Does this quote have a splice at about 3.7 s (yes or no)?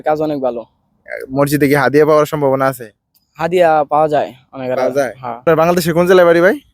no